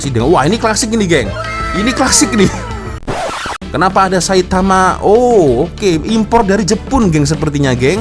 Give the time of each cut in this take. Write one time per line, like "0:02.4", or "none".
0:03.2